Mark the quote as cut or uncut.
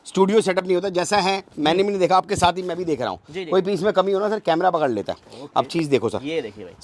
uncut